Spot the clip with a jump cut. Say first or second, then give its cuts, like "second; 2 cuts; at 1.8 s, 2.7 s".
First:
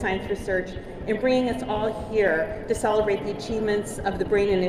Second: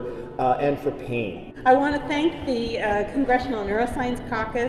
second; 1 cut; at 1.4 s